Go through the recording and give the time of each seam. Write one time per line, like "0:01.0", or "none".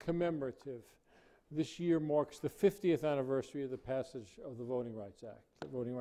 0:01.4